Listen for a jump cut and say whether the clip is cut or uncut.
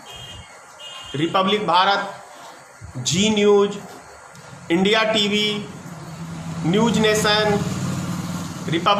uncut